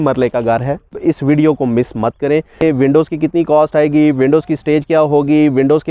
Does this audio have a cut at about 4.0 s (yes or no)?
no